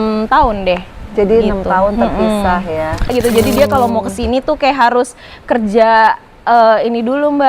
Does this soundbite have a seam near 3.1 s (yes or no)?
yes